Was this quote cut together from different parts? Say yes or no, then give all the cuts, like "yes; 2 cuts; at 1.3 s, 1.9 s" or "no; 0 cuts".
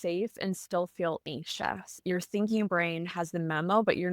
yes; 1 cut; at 2.0 s